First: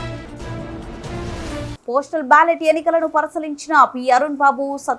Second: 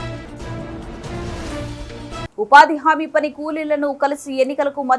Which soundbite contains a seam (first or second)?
second